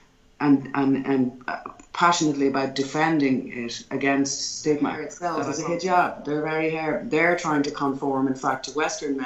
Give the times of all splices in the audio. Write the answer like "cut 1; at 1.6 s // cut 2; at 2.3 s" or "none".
cut 1; at 5.1 s